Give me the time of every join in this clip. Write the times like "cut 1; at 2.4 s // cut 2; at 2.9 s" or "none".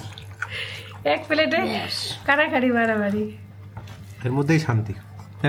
none

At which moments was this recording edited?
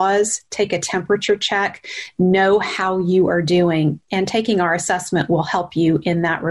none

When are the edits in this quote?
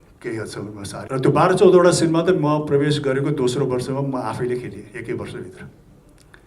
cut 1; at 1.0 s

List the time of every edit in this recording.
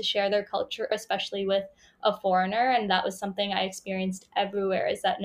cut 1; at 0.9 s

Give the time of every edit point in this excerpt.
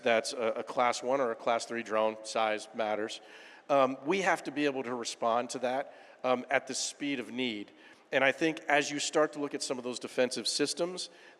none

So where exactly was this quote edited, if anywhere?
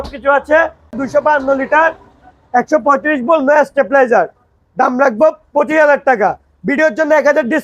cut 1; at 1.0 s

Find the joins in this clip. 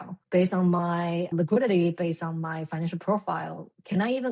cut 1; at 1.3 s

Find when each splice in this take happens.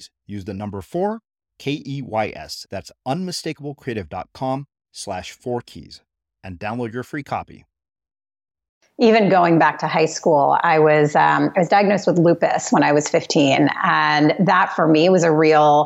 cut 1; at 8.8 s

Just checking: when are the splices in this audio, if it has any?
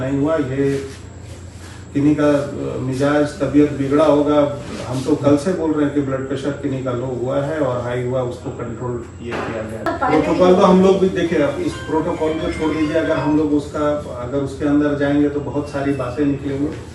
cut 1; at 9.8 s

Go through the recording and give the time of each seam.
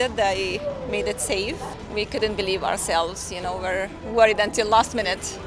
none

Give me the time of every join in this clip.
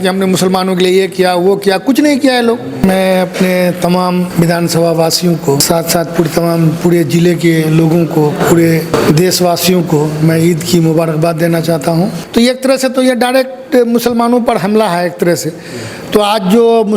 cut 1; at 2.8 s // cut 2; at 4.3 s // cut 3; at 5.6 s // cut 4; at 8.9 s // cut 5; at 12.2 s

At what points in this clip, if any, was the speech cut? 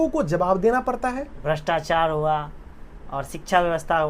cut 1; at 1.3 s

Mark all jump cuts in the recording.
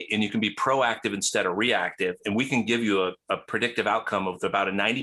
none

